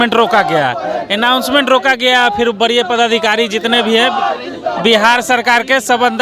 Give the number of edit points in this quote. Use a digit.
0